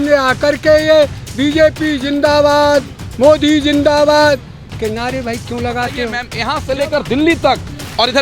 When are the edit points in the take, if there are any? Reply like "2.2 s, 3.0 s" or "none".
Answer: 6.3 s